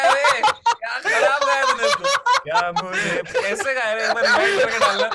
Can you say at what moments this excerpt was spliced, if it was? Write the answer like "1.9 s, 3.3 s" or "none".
none

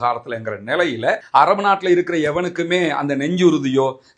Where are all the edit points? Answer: 1.2 s

